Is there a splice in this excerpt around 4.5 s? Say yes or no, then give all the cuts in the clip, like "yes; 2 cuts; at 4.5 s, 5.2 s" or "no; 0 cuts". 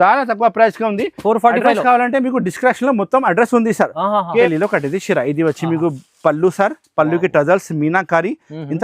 yes; 1 cut; at 4.5 s